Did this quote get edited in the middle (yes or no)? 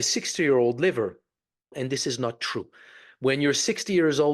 yes